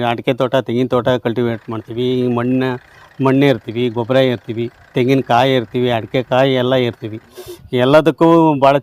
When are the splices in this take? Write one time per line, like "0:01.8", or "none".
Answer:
none